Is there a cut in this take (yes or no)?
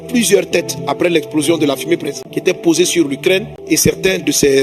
yes